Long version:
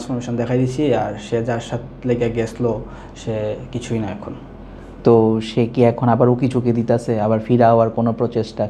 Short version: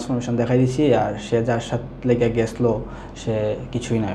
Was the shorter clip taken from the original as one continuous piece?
yes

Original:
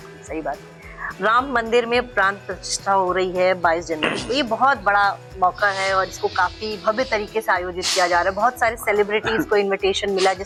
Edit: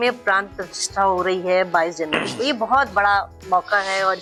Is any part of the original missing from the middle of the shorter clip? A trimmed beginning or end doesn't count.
no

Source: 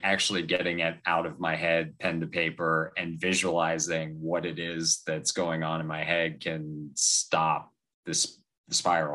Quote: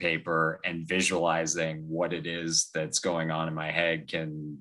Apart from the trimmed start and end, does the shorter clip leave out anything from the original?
no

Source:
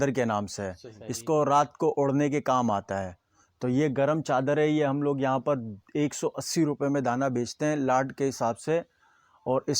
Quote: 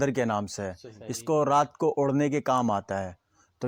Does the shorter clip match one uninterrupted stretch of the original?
yes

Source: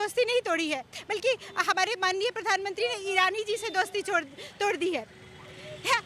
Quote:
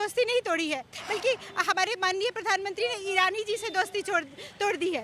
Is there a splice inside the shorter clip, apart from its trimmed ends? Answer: no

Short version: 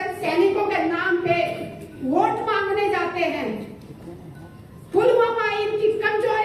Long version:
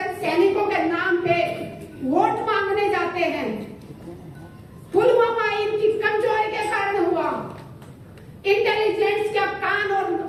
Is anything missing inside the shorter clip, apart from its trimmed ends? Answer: no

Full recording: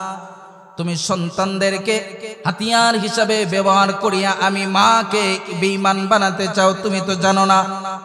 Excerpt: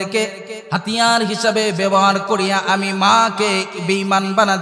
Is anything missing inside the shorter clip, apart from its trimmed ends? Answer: no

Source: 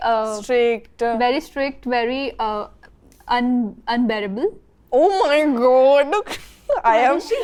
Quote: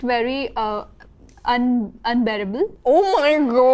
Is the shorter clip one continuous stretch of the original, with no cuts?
no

